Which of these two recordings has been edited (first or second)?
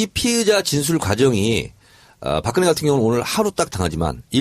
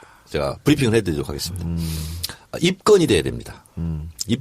first